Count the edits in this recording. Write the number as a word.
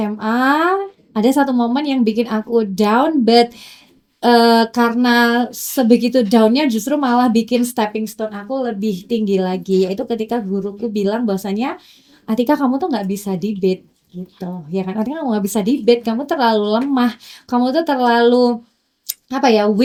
zero